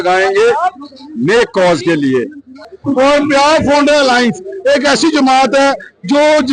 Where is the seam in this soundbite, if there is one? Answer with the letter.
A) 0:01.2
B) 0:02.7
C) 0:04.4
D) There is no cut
B